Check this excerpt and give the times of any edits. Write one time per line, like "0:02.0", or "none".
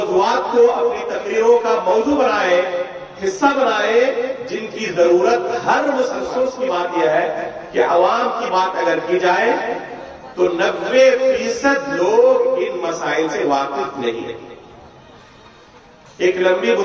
0:06.3